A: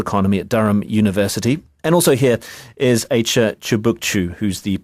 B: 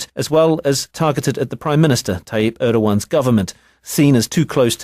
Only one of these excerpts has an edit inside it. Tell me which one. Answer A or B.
A